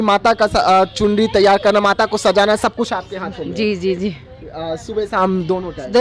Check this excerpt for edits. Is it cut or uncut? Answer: uncut